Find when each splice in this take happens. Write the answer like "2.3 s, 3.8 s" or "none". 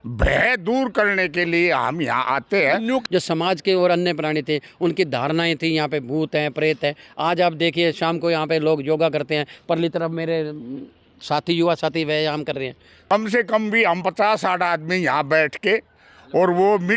3.0 s, 12.9 s